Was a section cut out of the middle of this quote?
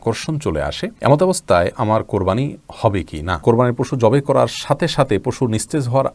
yes; 2 cuts; at 0.9 s, 3.4 s

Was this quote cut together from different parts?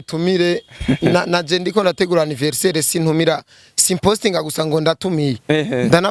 no; 0 cuts

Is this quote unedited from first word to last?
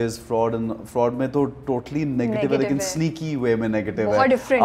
yes; 0 cuts

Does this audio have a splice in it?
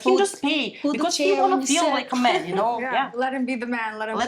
no; 0 cuts

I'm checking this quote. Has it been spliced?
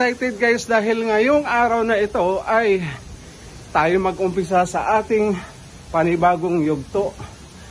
no; 0 cuts

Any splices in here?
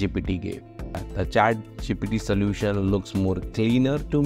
yes; 1 cut; at 1.0 s

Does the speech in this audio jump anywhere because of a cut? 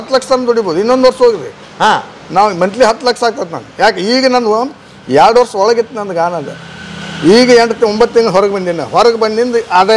no; 0 cuts

